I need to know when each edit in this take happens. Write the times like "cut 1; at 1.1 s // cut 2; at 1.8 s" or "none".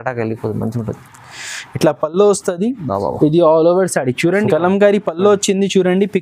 cut 1; at 4.5 s